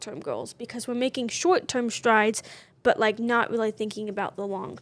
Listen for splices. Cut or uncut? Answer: uncut